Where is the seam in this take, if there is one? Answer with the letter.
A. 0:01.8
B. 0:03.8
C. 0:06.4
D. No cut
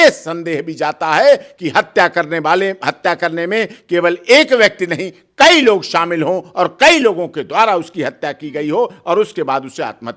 D